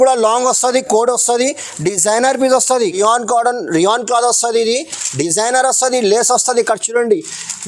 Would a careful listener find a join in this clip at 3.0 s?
yes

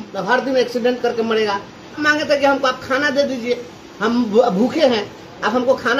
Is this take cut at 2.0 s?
yes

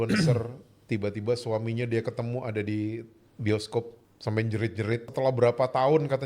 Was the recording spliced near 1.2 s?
no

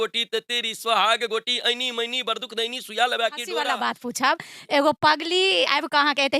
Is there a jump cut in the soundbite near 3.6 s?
yes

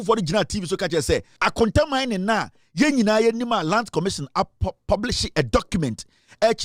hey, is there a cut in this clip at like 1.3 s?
yes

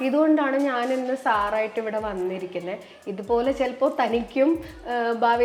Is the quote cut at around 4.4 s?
no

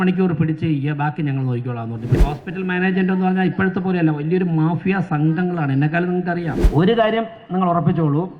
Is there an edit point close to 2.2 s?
yes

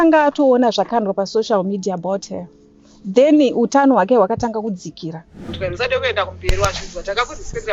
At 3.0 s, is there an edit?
no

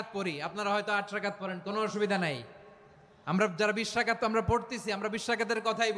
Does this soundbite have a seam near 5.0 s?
no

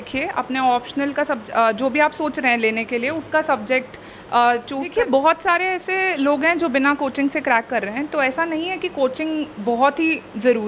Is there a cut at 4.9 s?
yes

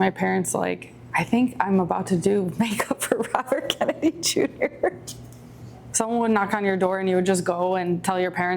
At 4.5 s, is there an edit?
no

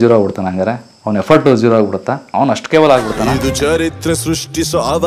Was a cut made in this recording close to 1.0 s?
no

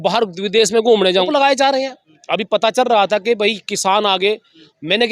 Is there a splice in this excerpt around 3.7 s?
no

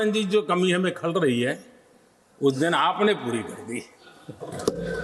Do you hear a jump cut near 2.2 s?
no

